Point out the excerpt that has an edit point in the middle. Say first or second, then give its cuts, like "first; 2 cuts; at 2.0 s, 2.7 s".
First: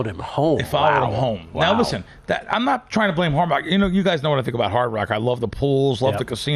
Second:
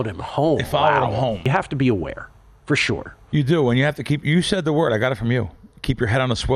second; 1 cut; at 1.4 s